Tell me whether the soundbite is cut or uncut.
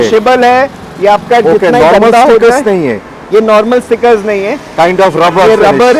uncut